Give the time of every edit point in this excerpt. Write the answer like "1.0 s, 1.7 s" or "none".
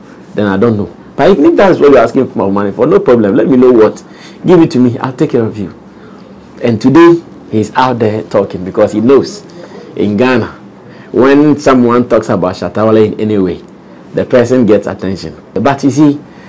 15.5 s